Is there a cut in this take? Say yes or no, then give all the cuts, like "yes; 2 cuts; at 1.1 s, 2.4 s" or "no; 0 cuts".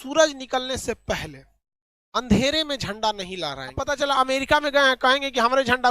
yes; 1 cut; at 3.8 s